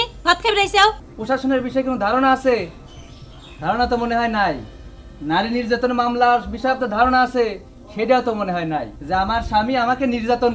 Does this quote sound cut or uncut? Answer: cut